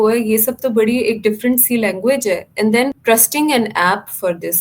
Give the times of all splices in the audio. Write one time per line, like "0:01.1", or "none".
0:03.0